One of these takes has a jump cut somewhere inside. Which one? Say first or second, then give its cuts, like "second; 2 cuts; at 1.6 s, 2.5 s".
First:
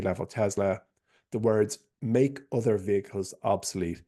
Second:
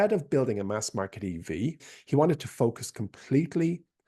second; 1 cut; at 1.9 s